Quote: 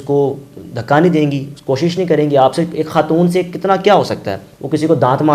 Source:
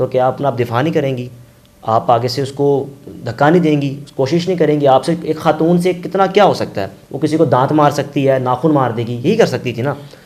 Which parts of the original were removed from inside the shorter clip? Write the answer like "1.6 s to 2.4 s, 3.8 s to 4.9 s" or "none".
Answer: none